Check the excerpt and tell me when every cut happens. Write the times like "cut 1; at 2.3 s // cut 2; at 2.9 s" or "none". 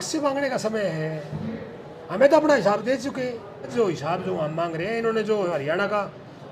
cut 1; at 3.7 s